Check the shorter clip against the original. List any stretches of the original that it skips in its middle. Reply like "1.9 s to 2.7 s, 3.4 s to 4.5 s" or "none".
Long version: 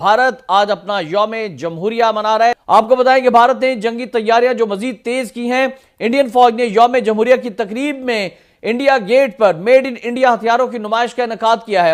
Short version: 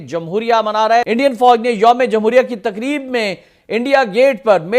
2.6 s to 6.0 s